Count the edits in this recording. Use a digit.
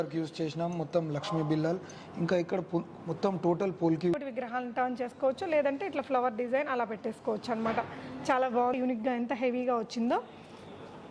2